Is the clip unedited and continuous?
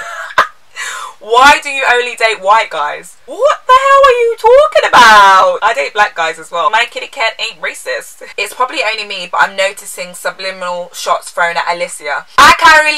no; 3 cuts; at 5.6 s, 6.7 s, 8.2 s

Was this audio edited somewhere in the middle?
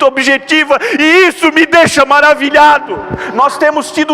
yes; 1 cut; at 3.2 s

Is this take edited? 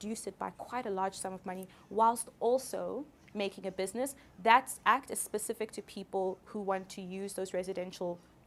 no; 0 cuts

